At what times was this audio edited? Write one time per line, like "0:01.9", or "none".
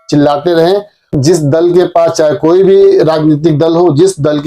0:01.1

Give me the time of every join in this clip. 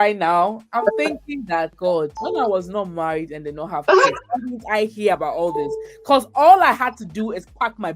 0:01.9

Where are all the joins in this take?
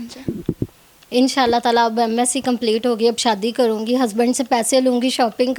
none

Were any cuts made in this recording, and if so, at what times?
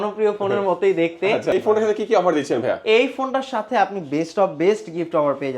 0:01.5

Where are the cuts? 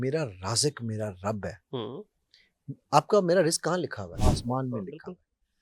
0:04.2

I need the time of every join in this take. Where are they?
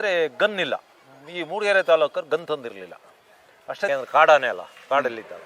0:03.9

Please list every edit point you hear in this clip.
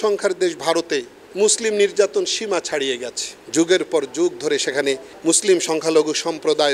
0:05.1

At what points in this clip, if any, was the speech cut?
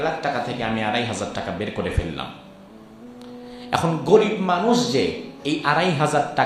none

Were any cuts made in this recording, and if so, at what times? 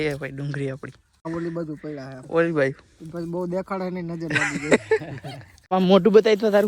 0:01.3
0:05.7

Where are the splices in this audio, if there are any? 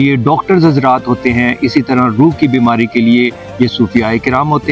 none

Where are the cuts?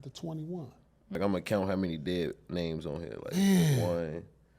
0:01.2

